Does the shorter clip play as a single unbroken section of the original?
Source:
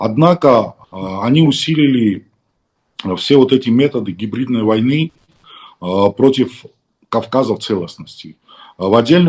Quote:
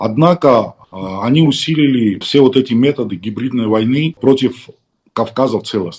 no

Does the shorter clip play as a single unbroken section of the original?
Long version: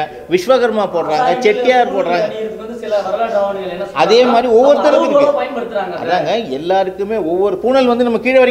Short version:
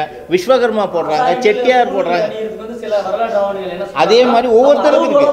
yes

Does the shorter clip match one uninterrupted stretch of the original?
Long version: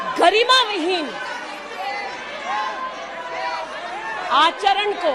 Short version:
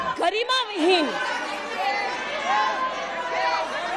yes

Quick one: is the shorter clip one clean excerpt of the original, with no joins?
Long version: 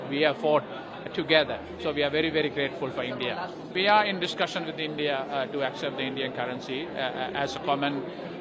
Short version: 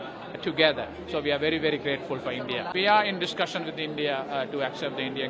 no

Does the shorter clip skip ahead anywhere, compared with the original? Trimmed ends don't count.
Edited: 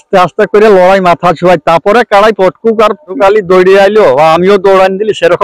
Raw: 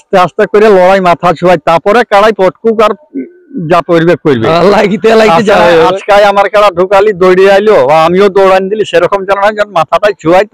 yes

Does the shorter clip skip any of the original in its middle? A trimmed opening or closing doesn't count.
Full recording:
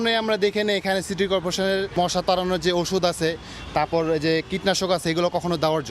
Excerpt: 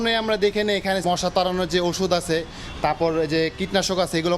yes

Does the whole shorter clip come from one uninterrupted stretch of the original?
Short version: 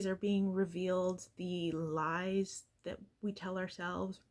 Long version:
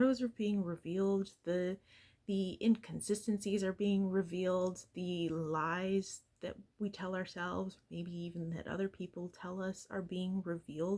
yes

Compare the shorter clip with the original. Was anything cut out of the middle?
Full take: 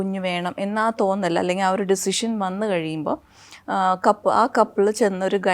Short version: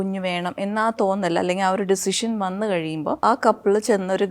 yes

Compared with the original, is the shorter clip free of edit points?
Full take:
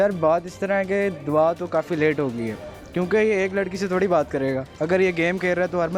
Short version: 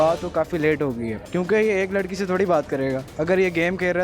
no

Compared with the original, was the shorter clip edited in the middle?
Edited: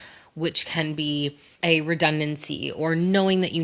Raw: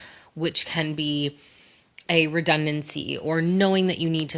yes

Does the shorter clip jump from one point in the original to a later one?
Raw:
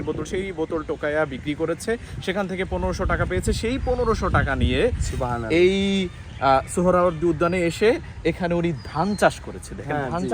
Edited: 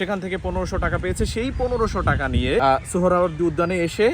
yes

